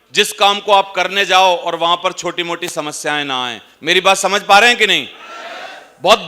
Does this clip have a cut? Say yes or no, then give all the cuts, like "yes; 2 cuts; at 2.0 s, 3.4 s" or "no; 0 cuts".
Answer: no; 0 cuts